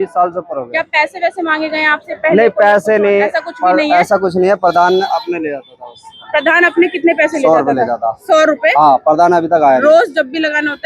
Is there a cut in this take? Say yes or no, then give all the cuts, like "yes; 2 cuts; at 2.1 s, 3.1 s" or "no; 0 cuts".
no; 0 cuts